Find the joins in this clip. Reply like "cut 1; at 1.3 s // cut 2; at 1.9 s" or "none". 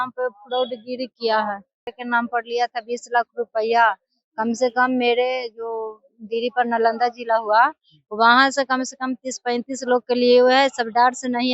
cut 1; at 1.9 s